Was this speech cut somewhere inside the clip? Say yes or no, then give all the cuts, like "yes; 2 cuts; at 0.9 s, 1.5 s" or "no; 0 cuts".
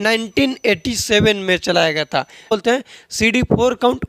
yes; 1 cut; at 2.5 s